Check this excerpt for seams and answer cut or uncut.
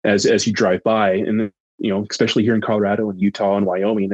cut